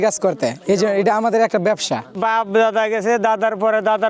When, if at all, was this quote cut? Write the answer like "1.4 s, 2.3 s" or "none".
2.1 s